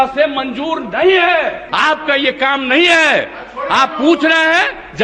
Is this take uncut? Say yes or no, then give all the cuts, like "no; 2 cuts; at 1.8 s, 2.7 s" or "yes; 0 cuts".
no; 1 cut; at 1.6 s